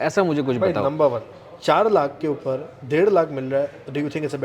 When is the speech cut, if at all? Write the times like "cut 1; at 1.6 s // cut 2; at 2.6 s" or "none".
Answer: cut 1; at 1.3 s